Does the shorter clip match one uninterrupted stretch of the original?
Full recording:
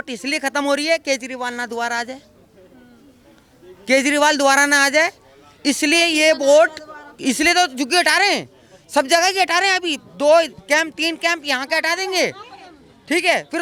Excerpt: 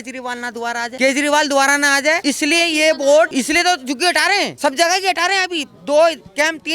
no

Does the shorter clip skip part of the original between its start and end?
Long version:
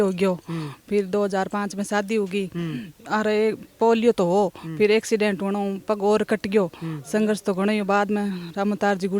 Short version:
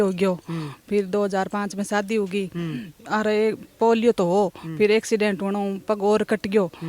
no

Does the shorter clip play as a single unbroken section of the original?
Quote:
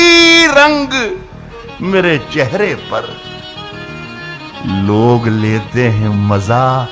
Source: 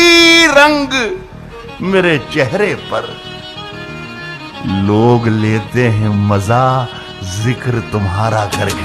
yes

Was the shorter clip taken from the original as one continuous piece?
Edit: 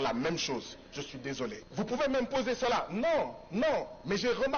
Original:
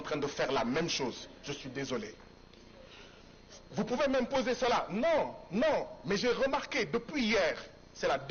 no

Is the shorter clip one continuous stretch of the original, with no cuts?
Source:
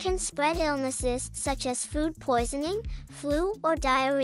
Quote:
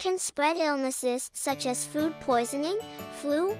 yes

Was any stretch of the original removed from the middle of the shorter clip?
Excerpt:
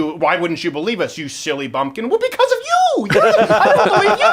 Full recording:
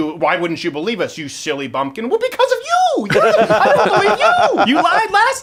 no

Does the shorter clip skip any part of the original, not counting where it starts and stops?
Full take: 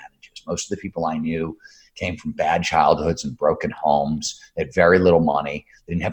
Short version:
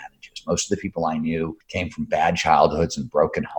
yes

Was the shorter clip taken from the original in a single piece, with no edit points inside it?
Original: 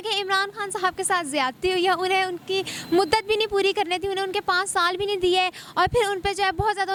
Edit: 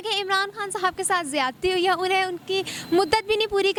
yes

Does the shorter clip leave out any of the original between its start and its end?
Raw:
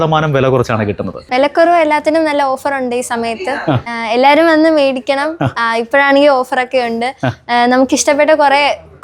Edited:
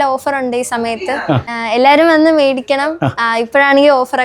no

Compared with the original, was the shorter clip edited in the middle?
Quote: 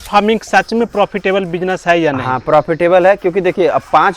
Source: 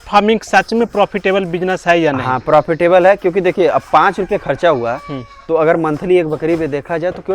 no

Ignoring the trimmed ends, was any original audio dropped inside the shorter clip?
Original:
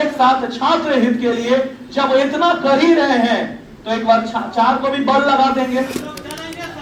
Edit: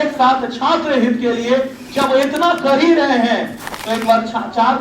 no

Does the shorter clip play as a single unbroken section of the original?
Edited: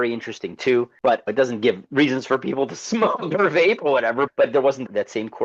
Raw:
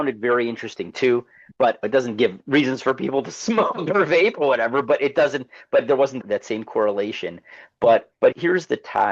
no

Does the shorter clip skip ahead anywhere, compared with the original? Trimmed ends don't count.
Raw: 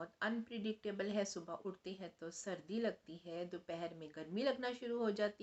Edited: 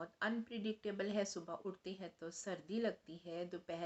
no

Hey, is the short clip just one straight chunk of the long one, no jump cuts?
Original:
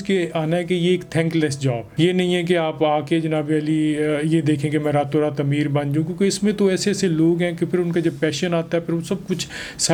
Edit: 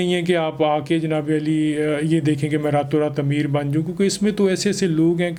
yes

